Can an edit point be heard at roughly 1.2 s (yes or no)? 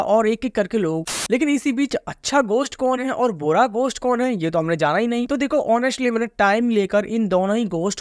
yes